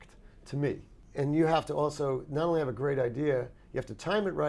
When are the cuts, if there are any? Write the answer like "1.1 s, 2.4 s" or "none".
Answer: 1.0 s